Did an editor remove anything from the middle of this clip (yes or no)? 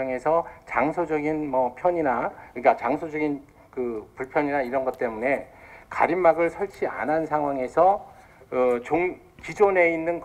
yes